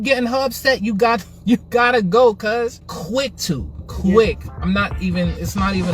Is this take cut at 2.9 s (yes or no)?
yes